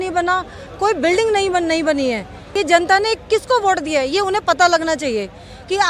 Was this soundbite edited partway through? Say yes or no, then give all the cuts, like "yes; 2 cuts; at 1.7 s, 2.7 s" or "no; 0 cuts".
yes; 1 cut; at 2.4 s